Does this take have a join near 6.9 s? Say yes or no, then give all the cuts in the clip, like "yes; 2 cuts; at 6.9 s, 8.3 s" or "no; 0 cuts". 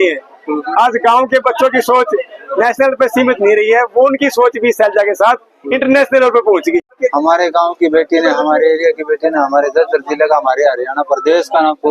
yes; 1 cut; at 6.9 s